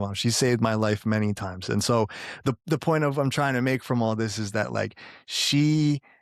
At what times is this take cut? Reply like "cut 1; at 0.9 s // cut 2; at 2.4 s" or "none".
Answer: none